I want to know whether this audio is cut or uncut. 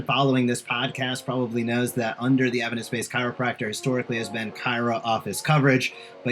uncut